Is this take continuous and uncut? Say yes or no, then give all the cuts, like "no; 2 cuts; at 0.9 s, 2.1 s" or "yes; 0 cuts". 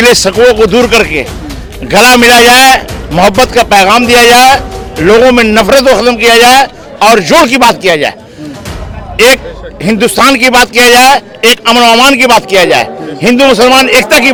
yes; 0 cuts